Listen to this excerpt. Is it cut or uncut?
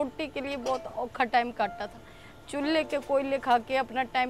uncut